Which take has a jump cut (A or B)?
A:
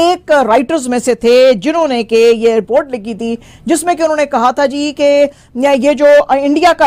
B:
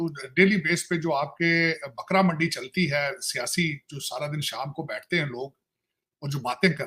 A